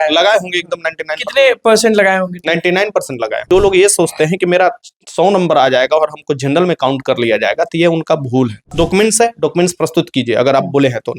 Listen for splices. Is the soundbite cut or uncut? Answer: cut